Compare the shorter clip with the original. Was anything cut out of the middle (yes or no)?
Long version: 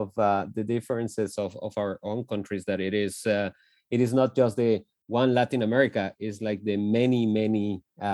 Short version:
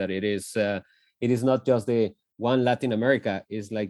no